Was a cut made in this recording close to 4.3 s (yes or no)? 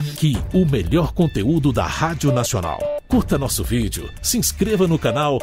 no